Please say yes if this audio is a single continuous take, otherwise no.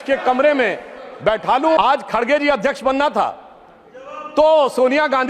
no